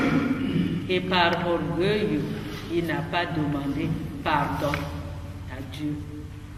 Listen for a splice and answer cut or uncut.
uncut